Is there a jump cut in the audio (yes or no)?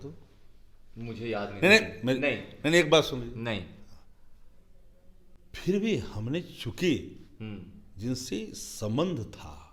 no